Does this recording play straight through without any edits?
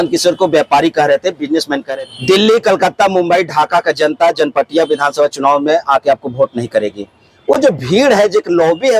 no; 1 cut; at 1.9 s

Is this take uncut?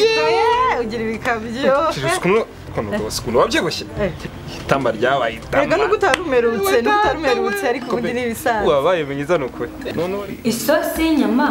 no; 1 cut; at 9.8 s

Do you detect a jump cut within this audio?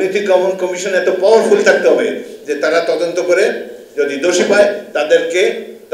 no; 0 cuts

